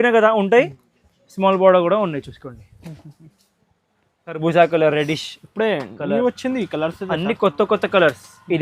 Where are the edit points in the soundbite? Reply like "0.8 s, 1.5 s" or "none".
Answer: 4.4 s